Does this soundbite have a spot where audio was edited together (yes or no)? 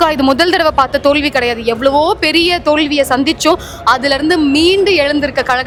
no